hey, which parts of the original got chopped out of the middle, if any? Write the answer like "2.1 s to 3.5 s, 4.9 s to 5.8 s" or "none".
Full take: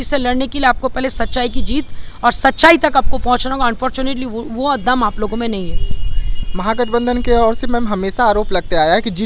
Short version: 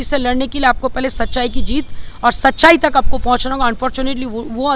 none